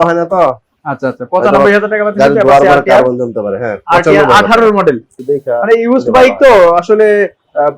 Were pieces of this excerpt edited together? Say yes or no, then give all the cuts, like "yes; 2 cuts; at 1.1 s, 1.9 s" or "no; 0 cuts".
yes; 1 cut; at 5.1 s